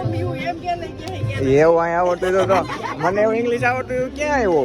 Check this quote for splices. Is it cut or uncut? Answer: uncut